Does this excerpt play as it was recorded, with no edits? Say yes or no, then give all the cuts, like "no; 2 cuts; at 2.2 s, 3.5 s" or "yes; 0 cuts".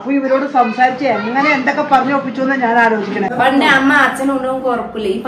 no; 1 cut; at 3.3 s